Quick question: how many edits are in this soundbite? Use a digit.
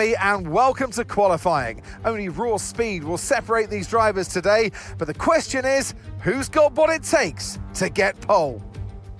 0